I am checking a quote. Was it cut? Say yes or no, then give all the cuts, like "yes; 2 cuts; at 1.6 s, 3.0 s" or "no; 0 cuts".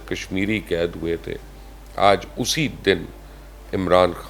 no; 0 cuts